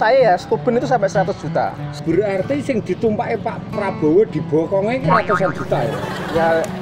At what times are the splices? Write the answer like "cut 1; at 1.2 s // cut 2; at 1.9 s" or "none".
cut 1; at 1.8 s